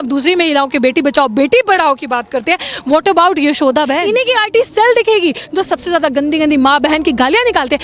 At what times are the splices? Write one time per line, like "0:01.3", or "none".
0:04.1